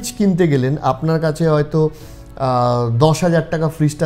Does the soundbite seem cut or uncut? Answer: uncut